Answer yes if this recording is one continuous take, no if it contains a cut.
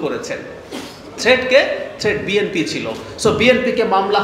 yes